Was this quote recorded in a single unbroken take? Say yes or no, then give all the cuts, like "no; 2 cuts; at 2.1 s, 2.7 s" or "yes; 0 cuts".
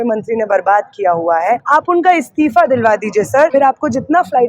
no; 2 cuts; at 1.6 s, 3.5 s